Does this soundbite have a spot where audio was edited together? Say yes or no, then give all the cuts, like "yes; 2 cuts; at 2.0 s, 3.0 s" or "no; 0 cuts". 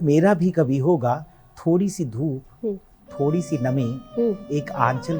no; 0 cuts